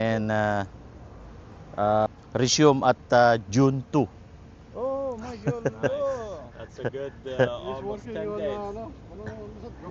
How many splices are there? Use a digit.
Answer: 1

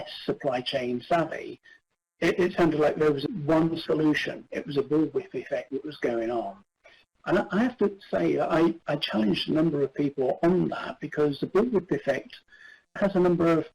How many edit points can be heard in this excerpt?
0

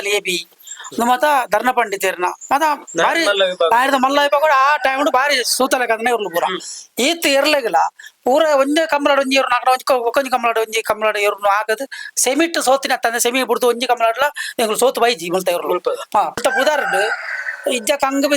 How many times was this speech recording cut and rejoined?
1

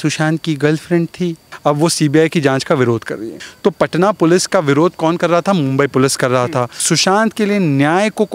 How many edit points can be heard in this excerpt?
3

